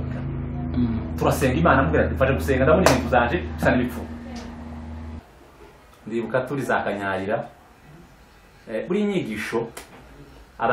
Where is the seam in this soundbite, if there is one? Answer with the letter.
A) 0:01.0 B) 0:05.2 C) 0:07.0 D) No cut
B